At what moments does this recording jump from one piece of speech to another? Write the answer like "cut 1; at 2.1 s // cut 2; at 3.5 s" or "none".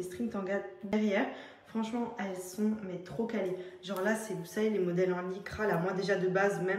cut 1; at 0.9 s